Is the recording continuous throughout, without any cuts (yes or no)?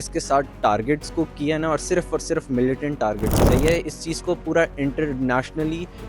no